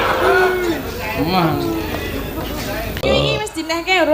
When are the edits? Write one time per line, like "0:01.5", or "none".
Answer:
0:03.0